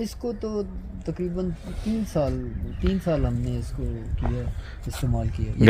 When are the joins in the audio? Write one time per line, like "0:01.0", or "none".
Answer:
none

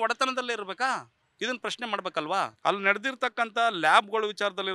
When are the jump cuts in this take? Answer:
0:01.2
0:02.5

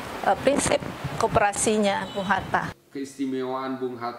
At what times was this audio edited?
0:02.8

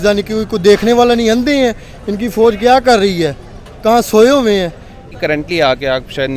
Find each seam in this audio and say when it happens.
0:05.1

